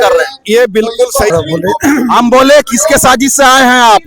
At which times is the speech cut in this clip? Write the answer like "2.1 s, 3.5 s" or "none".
1.3 s